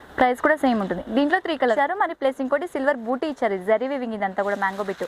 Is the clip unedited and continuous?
no; 1 cut; at 1.8 s

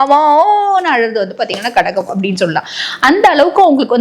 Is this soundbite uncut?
yes; 0 cuts

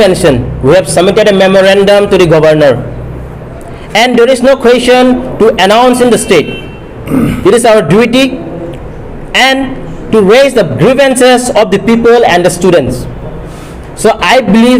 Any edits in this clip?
yes; 1 cut; at 3.4 s

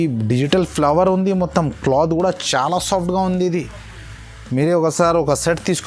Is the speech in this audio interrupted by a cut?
no; 0 cuts

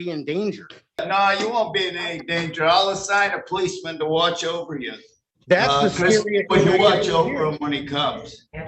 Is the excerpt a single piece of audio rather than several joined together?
no; 1 cut; at 1.0 s

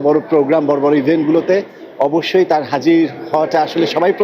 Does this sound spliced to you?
no; 0 cuts

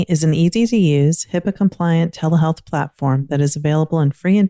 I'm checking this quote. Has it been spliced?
no; 0 cuts

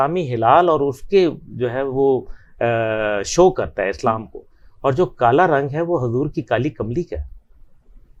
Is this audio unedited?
yes; 0 cuts

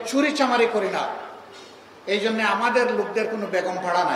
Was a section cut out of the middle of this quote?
no; 0 cuts

